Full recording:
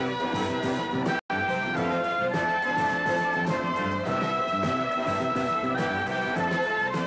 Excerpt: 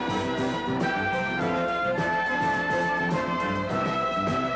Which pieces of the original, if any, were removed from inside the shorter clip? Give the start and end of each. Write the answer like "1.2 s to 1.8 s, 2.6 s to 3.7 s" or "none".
1.2 s to 1.3 s